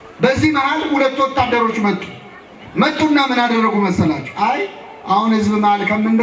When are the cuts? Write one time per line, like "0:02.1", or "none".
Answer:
none